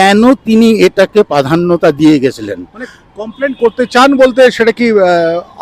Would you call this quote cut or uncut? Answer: uncut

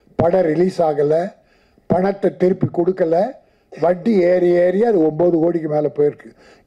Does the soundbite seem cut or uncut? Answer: uncut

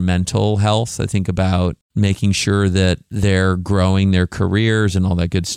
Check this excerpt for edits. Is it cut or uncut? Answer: cut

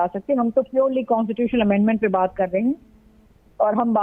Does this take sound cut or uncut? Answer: uncut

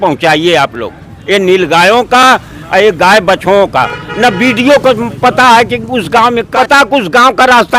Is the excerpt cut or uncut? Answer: cut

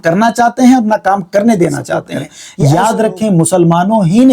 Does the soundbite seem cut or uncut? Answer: cut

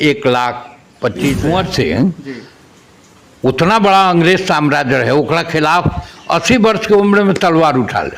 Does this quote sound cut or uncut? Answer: cut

